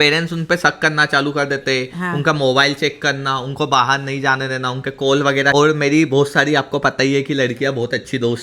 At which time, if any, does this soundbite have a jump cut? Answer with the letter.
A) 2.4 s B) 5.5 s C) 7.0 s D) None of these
B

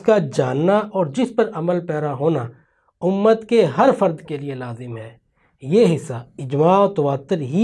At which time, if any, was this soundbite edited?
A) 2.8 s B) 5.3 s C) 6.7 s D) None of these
D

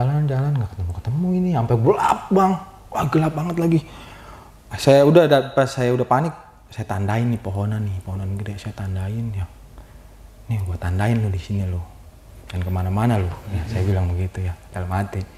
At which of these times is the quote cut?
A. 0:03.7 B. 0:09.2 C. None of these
C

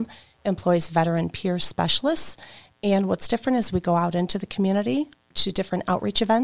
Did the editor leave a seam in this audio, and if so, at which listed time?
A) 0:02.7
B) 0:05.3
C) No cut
B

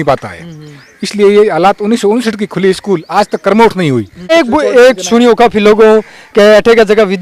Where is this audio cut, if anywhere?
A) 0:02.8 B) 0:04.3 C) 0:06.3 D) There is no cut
B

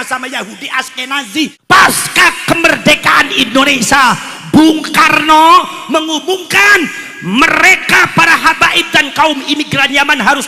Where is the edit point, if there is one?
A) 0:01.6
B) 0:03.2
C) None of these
A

